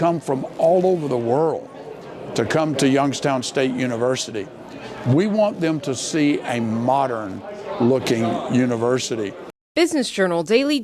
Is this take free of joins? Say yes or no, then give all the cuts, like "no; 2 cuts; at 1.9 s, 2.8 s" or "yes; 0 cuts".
no; 1 cut; at 9.5 s